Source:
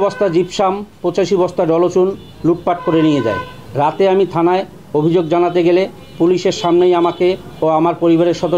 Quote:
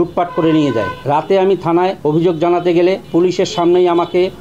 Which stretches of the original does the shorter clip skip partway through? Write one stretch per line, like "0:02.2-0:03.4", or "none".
0:03.5-0:03.7
0:04.7-0:04.9
0:05.9-0:06.1